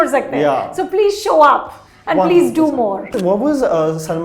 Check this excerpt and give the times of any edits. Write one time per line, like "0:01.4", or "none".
0:03.2